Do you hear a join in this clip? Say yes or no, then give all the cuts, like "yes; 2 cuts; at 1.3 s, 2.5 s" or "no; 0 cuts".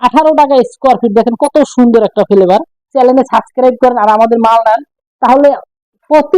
yes; 1 cut; at 2.8 s